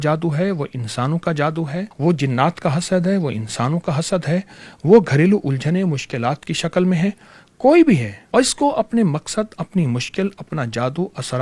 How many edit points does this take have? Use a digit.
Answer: 2